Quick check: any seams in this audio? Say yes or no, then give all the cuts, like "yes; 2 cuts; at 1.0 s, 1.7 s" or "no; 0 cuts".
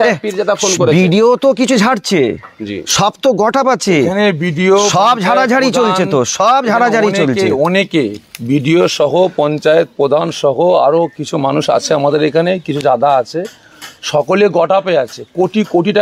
no; 0 cuts